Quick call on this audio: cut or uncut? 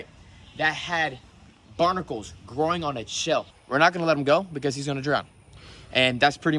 cut